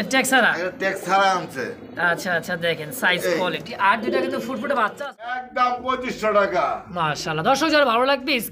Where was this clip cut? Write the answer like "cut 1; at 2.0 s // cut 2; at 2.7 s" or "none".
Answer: cut 1; at 5.4 s